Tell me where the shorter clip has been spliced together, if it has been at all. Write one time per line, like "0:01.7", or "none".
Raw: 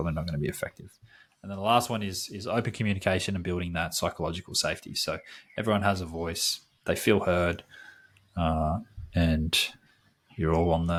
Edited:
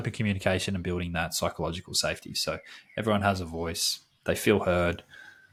none